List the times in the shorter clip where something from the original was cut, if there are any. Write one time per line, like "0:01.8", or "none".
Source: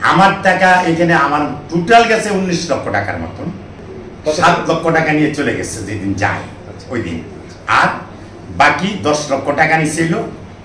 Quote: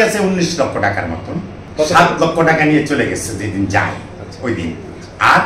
0:01.6